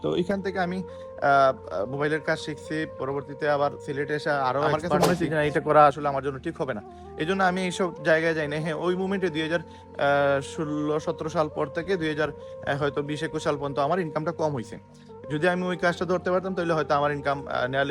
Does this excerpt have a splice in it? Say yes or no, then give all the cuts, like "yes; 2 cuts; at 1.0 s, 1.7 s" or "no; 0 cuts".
yes; 1 cut; at 4.9 s